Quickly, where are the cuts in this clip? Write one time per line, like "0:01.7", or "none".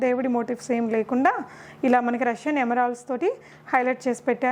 none